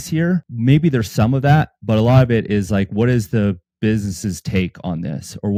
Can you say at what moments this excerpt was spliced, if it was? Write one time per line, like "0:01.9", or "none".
none

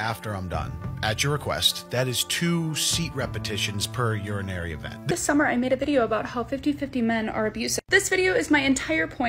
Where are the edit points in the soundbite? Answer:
0:05.1
0:07.9

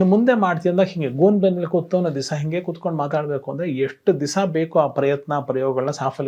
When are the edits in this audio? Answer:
none

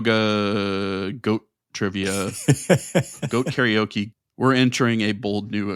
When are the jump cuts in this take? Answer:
0:03.1
0:04.1

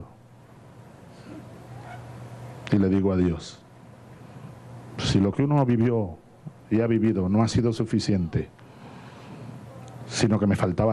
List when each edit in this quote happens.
0:07.6

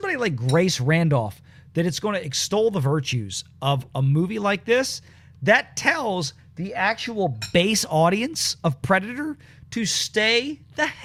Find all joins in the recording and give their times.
none

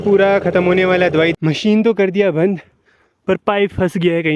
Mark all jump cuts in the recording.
0:01.3

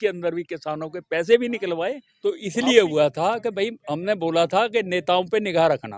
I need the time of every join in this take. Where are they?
0:02.1

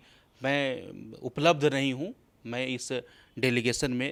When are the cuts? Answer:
none

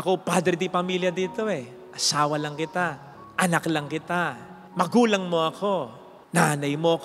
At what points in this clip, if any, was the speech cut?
none

